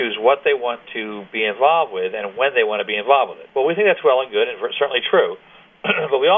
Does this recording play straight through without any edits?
no; 1 cut; at 3.4 s

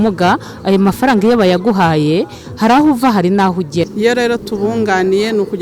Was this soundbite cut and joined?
yes; 1 cut; at 3.9 s

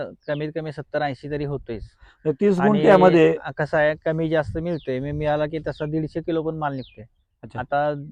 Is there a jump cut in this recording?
no; 0 cuts

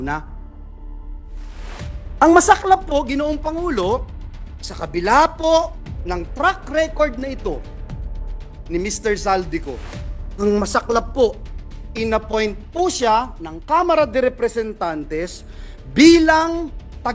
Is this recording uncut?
yes; 0 cuts

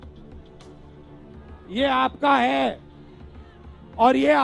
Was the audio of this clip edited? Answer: no; 0 cuts

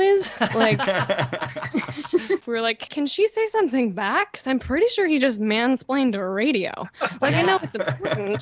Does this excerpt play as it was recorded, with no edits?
no; 1 cut; at 2.4 s

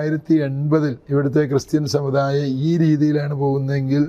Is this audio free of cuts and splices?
no; 1 cut; at 1.0 s

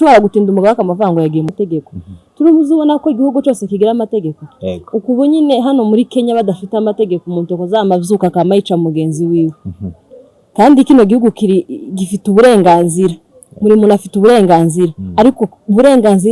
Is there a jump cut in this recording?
yes; 1 cut; at 1.5 s

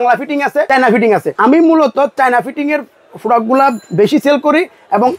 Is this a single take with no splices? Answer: no; 1 cut; at 1.0 s

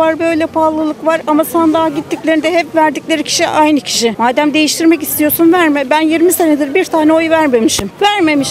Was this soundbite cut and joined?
no; 0 cuts

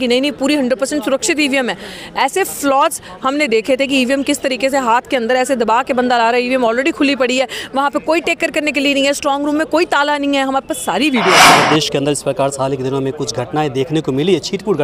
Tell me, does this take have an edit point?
yes; 1 cut; at 11.4 s

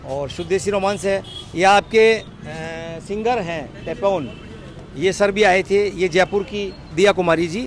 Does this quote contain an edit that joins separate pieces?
no; 0 cuts

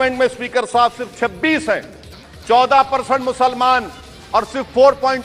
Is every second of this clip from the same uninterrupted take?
yes; 0 cuts

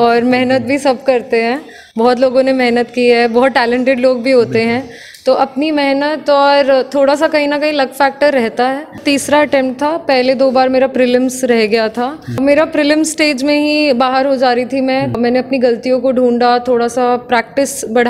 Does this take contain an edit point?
yes; 3 cuts; at 9.0 s, 12.4 s, 15.2 s

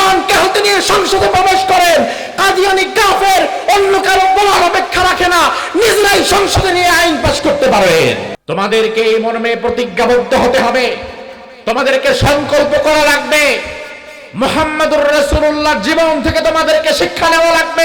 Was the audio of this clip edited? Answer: yes; 1 cut; at 8.3 s

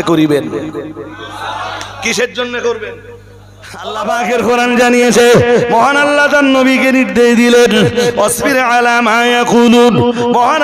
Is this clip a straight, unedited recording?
no; 1 cut; at 4.1 s

